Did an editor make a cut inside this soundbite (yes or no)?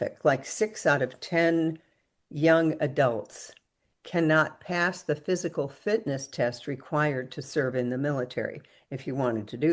no